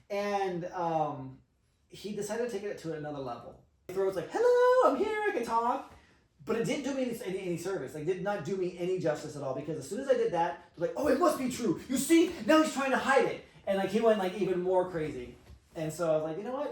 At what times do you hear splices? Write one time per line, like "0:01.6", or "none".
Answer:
none